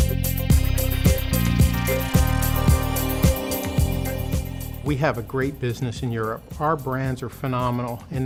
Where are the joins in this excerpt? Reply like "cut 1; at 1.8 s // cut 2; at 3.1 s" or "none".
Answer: none